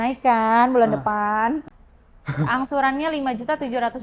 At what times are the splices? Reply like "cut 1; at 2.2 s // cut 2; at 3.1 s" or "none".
cut 1; at 1.7 s